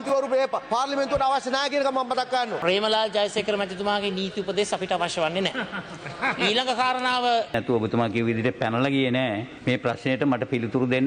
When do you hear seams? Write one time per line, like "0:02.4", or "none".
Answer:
0:02.6
0:07.5
0:09.5